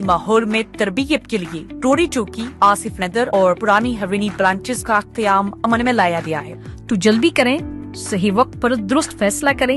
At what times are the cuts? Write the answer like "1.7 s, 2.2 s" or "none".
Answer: 6.5 s